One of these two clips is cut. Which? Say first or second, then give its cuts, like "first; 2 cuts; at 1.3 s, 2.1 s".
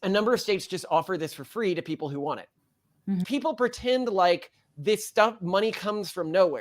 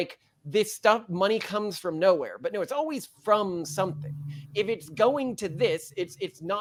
first; 1 cut; at 3.3 s